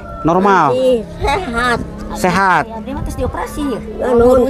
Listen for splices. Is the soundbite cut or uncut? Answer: uncut